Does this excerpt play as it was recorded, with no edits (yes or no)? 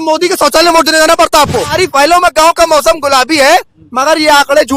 no